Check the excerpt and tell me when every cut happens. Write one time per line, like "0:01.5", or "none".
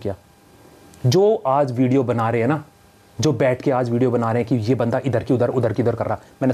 none